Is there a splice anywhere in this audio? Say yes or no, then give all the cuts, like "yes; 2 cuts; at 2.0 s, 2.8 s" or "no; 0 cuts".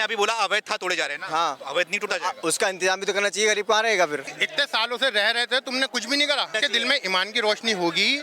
yes; 2 cuts; at 4.4 s, 6.5 s